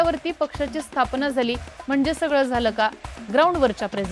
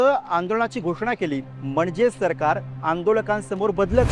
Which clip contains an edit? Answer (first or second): second